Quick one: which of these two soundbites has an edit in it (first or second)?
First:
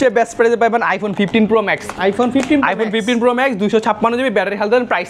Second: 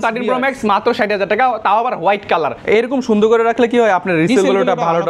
second